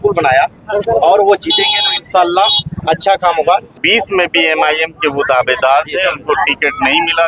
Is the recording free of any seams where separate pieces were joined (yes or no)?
no